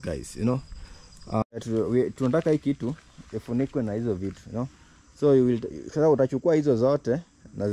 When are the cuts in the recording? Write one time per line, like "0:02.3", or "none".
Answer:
0:01.2